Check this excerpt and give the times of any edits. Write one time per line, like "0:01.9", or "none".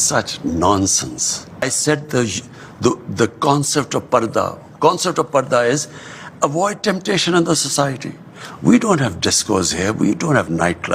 0:01.6

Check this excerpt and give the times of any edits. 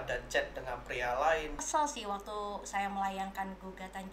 0:01.6

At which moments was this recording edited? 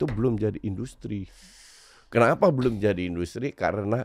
none

